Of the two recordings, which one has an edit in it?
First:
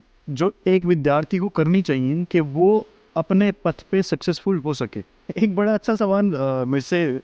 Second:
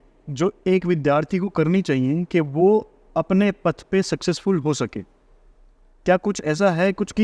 first; 1 cut; at 5.2 s

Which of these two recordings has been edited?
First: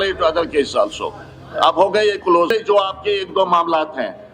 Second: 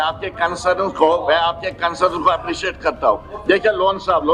first; 1 cut; at 2.5 s

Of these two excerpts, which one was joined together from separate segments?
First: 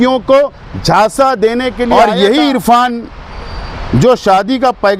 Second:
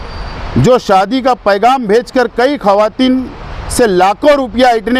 first; 1 cut; at 1.8 s

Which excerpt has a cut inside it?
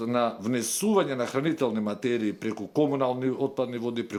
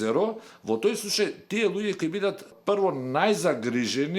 second; 1 cut; at 2.5 s

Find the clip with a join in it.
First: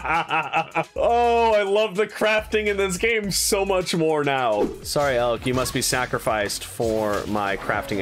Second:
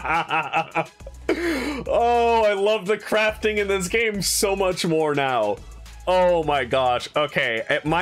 first; 2 cuts; at 0.9 s, 4.8 s

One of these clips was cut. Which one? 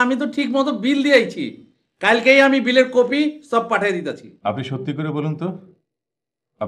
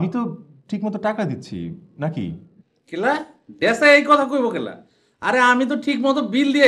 first; 1 cut; at 4.3 s

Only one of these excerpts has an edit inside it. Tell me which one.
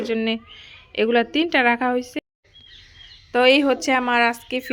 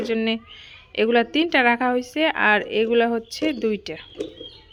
first; 1 cut; at 2.2 s

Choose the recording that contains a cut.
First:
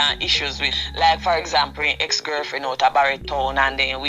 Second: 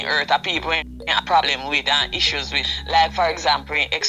second; 1 cut; at 0.9 s

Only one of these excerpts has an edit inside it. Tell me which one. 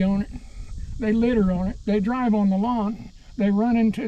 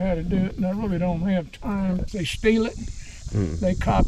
second; 1 cut; at 2.2 s

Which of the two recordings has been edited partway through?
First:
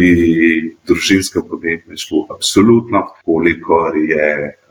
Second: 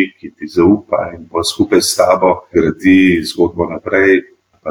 first; 1 cut; at 3.1 s

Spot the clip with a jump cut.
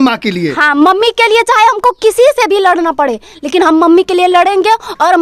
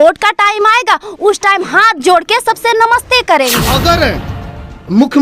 second; 1 cut; at 3.7 s

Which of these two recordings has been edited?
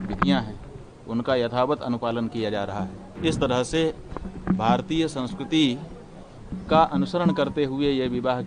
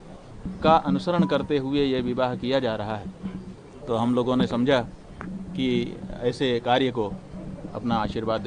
first; 1 cut; at 3.0 s

